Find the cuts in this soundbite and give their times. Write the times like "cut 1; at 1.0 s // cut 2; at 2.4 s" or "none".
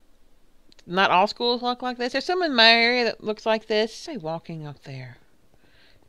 none